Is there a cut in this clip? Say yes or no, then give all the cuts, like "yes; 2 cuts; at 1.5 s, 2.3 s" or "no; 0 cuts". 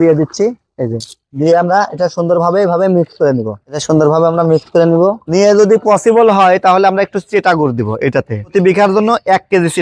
no; 0 cuts